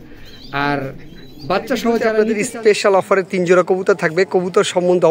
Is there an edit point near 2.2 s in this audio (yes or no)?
yes